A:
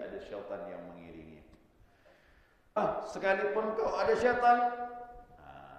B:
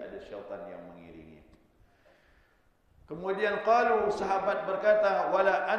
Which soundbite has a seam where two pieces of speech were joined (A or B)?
A